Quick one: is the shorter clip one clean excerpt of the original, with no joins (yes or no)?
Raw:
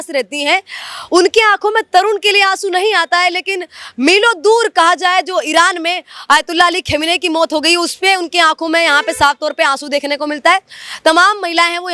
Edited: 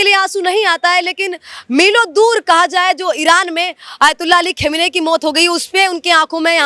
yes